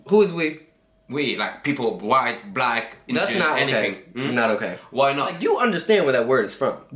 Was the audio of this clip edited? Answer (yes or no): yes